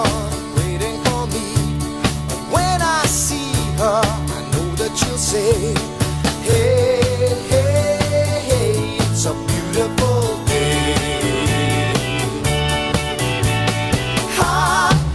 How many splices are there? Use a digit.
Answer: 0